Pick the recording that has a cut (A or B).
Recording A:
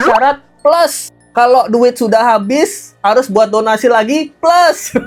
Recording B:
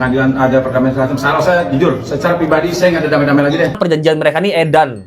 B